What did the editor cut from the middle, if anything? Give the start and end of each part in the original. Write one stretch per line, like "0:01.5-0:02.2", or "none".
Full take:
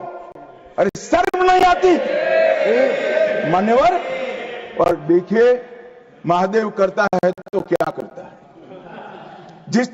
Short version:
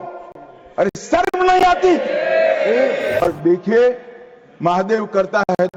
0:03.2-0:04.8